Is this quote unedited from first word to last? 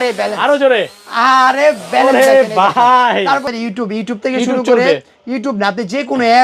no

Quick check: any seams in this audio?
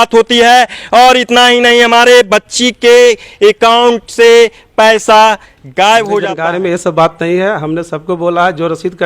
yes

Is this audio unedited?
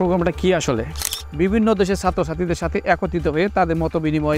no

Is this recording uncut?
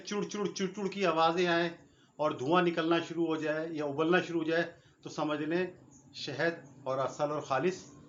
yes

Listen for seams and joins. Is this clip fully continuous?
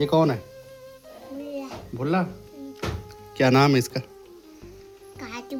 yes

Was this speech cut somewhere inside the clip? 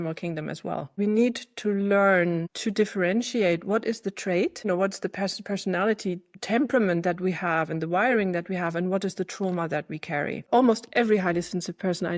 yes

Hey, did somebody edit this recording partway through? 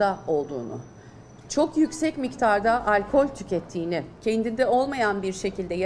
yes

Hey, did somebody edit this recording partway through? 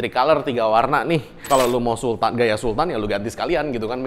yes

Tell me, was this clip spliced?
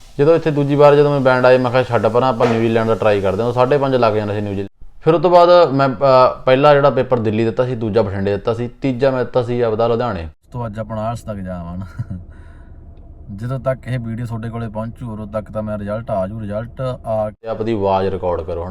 yes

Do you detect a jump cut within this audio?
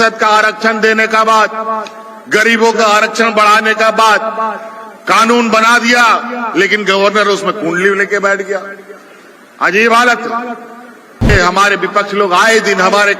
yes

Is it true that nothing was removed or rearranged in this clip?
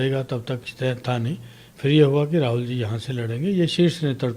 yes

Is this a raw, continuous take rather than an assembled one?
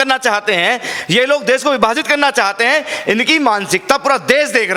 yes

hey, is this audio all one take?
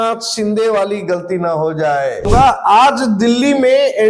no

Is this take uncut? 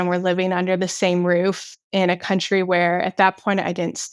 yes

